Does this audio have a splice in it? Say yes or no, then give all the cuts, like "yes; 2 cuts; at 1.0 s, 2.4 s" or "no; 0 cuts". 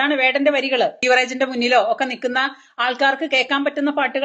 yes; 1 cut; at 1.0 s